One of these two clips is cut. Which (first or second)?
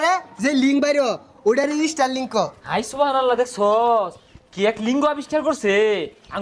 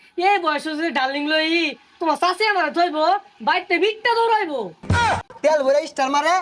second